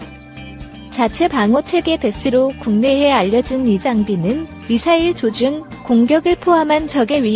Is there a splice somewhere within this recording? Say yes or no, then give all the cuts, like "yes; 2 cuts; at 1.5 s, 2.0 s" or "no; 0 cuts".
yes; 1 cut; at 0.9 s